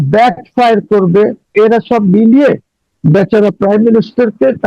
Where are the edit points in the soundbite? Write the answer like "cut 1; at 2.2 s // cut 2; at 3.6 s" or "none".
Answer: cut 1; at 1.5 s